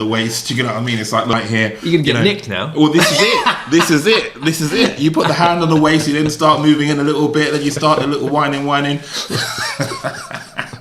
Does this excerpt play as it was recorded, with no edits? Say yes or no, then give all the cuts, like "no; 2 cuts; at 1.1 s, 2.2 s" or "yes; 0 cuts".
no; 1 cut; at 1.3 s